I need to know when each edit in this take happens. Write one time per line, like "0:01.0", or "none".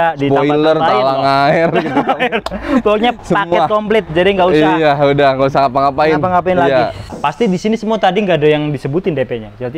0:07.1